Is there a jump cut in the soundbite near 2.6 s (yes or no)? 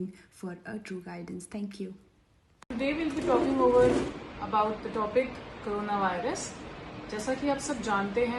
yes